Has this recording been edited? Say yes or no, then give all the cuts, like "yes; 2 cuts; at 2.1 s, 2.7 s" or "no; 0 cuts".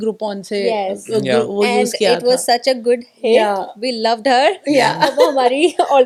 no; 0 cuts